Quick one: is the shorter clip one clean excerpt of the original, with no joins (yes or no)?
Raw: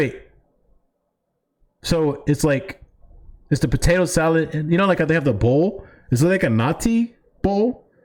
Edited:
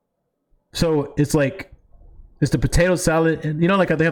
yes